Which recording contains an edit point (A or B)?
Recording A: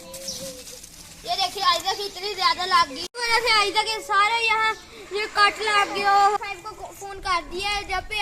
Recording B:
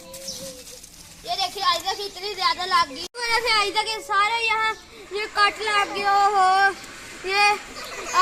A